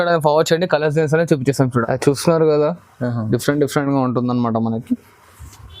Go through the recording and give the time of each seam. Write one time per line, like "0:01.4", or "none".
0:01.8